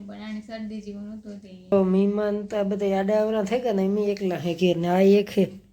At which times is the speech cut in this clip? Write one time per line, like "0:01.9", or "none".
0:01.7